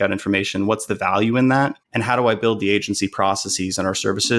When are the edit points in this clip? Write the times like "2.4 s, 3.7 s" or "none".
1.9 s